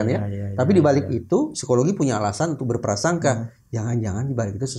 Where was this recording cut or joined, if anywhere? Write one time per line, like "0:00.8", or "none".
none